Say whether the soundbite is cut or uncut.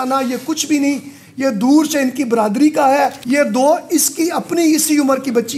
cut